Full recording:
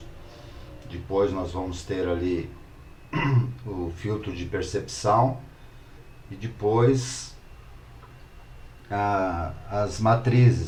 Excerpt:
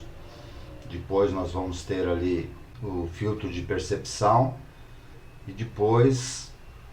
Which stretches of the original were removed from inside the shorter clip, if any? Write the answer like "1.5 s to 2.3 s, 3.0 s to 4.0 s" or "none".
2.7 s to 3.6 s